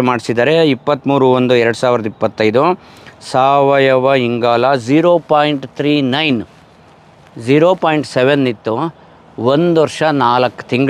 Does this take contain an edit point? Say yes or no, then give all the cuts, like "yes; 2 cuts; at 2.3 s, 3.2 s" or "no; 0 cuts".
no; 0 cuts